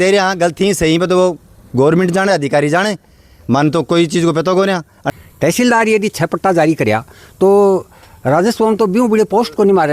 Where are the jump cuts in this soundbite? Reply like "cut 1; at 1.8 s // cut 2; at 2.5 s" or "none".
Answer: cut 1; at 4.9 s

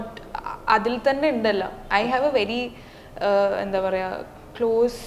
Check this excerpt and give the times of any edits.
none

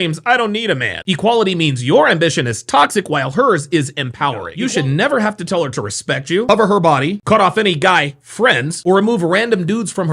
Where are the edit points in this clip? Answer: cut 1; at 4.5 s

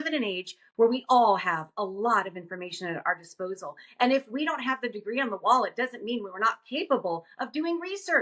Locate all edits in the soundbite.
none

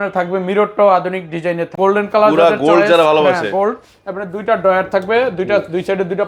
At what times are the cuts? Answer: cut 1; at 1.7 s

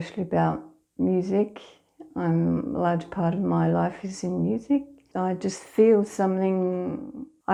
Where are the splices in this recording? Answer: none

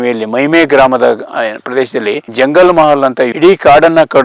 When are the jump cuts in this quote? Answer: cut 1; at 2.3 s // cut 2; at 3.3 s

